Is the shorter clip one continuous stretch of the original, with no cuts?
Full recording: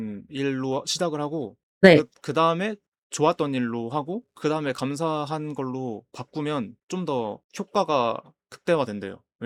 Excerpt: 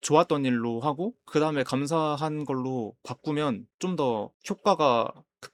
yes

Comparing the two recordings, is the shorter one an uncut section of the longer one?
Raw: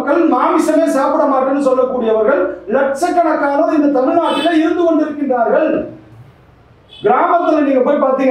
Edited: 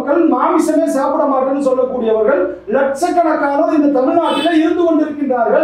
yes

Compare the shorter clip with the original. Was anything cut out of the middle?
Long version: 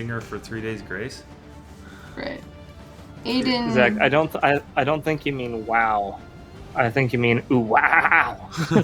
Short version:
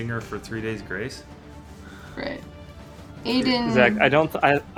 no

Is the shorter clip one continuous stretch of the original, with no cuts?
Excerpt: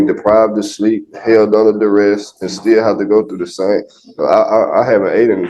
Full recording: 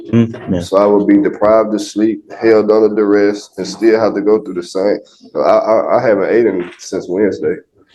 yes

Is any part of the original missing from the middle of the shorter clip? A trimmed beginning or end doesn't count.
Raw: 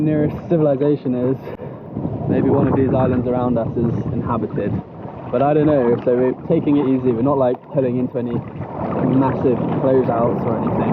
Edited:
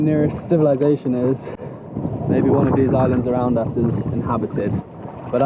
no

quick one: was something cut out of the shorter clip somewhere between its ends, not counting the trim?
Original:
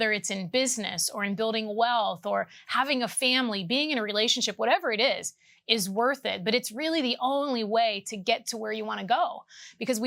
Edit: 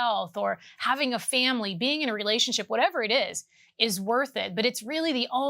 no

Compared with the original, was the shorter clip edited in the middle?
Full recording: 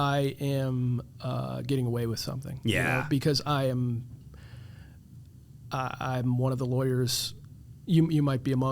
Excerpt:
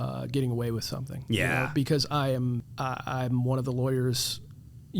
yes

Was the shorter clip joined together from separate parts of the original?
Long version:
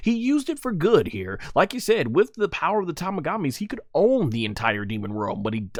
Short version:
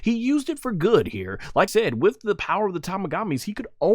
yes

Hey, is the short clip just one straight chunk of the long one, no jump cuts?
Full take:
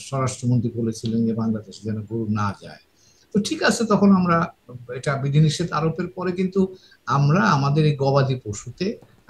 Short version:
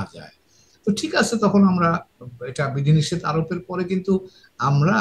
yes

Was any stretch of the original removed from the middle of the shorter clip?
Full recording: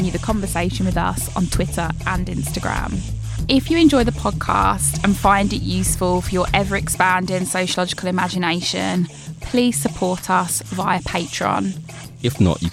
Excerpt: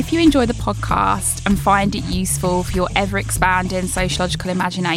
no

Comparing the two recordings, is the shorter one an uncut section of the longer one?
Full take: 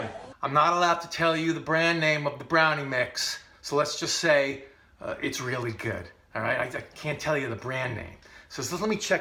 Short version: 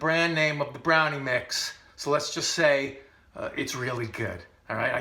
yes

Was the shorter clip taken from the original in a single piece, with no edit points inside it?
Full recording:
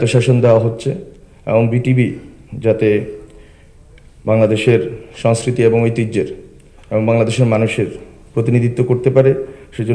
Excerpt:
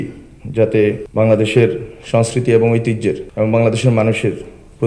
no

